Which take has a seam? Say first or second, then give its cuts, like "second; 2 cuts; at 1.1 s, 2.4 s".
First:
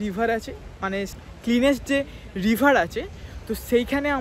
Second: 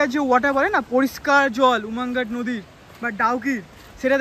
first; 1 cut; at 1.2 s